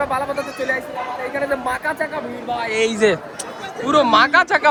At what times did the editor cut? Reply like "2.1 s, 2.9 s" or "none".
none